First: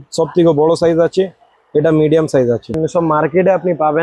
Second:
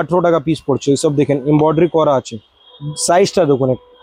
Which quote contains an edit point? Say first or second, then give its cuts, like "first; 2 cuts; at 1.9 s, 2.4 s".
first; 1 cut; at 2.8 s